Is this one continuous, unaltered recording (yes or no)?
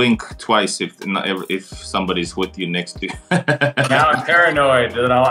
yes